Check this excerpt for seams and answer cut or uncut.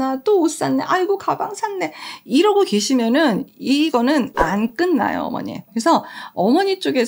cut